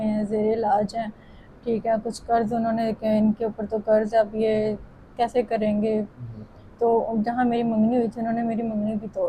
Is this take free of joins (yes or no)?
yes